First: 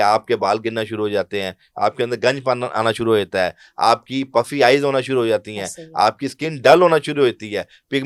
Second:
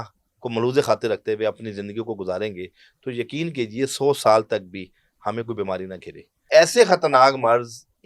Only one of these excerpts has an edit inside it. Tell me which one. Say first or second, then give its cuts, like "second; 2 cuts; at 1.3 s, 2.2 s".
second; 1 cut; at 6.3 s